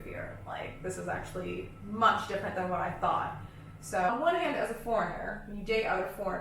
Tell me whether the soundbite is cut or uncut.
cut